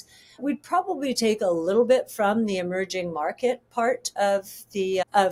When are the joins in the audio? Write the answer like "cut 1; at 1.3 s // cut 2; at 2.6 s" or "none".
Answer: none